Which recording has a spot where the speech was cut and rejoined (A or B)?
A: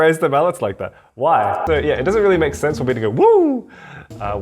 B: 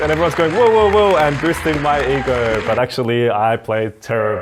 A